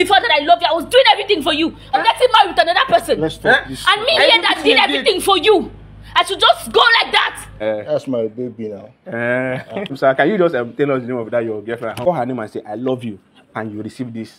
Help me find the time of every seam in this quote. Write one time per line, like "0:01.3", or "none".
0:02.0
0:07.5
0:10.0
0:12.0

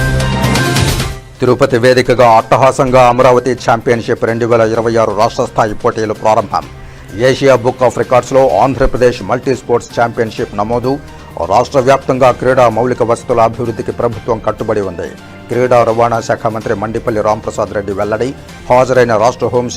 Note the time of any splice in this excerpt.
0:01.1

